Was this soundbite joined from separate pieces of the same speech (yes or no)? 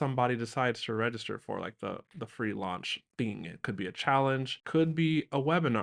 no